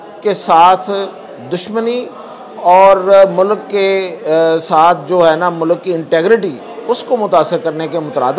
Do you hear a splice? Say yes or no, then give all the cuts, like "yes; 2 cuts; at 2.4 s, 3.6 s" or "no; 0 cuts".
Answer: no; 0 cuts